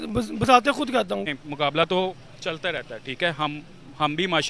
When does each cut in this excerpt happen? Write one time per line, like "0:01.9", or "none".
0:01.3